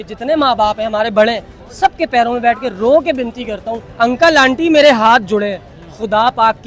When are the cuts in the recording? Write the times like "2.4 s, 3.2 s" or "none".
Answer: 3.8 s